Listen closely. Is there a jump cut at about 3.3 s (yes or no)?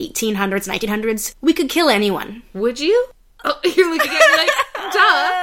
yes